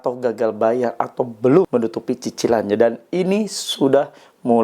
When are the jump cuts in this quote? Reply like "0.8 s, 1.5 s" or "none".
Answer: 1.7 s